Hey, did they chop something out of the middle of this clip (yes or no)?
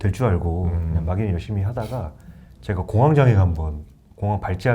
no